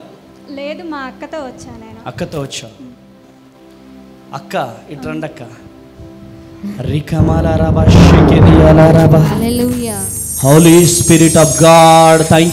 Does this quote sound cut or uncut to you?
uncut